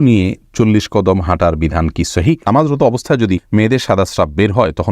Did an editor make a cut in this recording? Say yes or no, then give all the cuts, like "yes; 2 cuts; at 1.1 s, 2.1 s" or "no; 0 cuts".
yes; 2 cuts; at 2.5 s, 3.4 s